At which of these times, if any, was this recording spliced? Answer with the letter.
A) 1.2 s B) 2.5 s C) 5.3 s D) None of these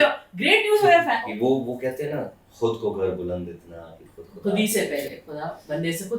A